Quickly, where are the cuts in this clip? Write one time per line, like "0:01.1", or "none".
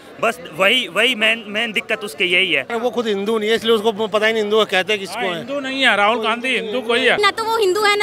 0:02.7
0:07.2

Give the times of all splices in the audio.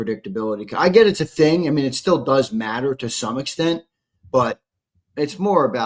none

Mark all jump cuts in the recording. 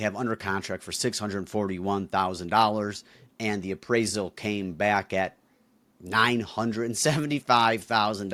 none

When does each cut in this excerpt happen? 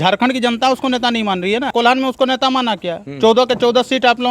0:01.7

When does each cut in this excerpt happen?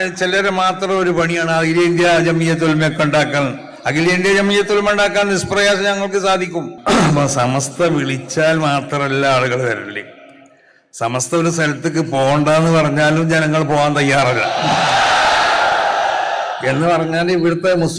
0:06.8

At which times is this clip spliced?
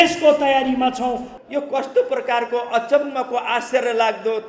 0:01.3

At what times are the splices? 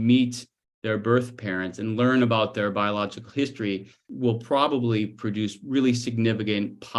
0:04.1

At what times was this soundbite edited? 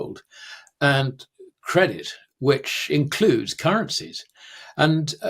none

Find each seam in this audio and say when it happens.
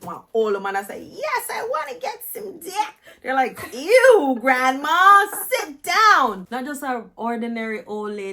0:06.4

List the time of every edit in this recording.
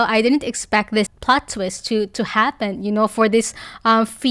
0:01.1

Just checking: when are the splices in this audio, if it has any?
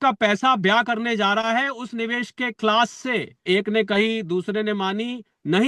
0:03.4

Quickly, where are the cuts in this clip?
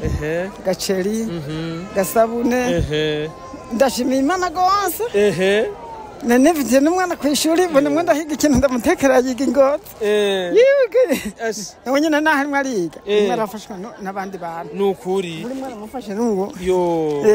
none

